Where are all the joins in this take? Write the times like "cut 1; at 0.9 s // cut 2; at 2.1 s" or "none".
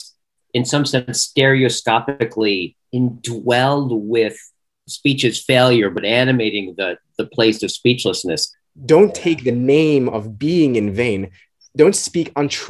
cut 1; at 4.8 s // cut 2; at 6.0 s // cut 3; at 8.4 s // cut 4; at 11.5 s